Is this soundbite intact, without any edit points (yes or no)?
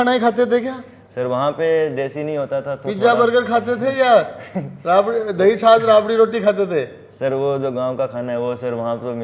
yes